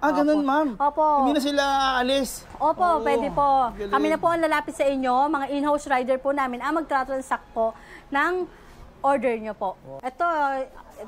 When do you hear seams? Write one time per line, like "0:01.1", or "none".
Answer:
0:09.9